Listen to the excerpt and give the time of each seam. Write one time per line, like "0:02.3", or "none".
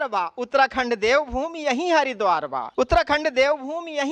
0:02.6

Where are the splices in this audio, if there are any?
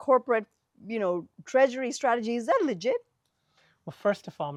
none

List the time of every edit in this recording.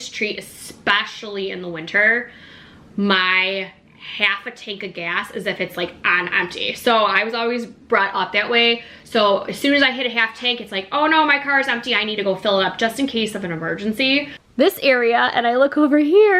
0:14.4

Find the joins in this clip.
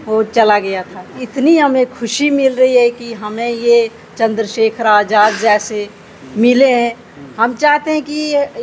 0:01.2

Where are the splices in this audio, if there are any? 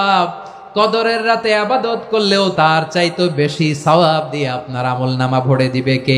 0:02.5

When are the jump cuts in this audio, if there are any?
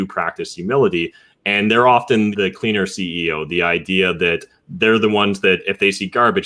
0:02.3

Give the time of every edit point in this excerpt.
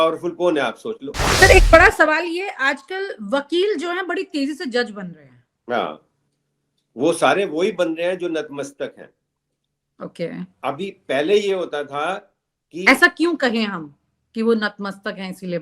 0:01.3

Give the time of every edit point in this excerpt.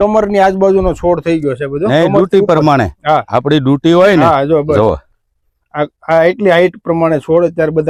none

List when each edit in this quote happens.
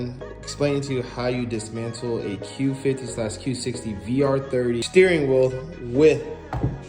0:04.8

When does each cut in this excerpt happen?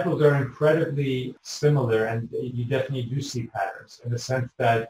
0:01.3

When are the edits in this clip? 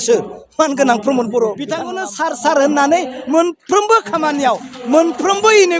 0:01.9

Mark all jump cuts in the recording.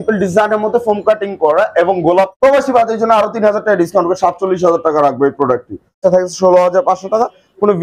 0:02.3
0:06.0

